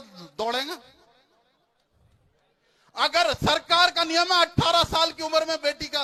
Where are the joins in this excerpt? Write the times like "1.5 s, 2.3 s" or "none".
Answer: none